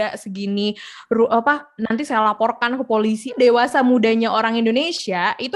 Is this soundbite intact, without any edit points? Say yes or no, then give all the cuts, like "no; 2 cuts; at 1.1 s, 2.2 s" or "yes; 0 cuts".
no; 1 cut; at 3.4 s